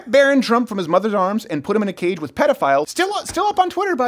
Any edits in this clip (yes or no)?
yes